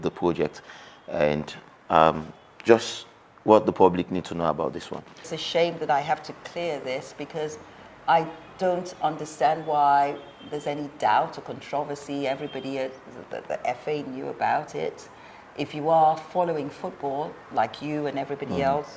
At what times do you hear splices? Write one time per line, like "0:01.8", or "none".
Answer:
0:05.2